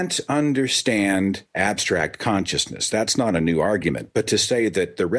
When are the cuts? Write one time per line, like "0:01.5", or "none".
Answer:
0:01.5